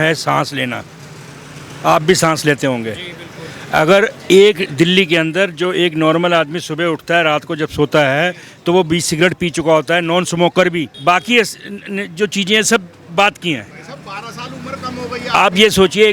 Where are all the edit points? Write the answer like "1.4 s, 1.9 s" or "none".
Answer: 10.9 s